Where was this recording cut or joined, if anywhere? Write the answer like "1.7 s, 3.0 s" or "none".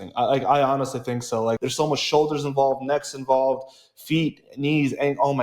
1.6 s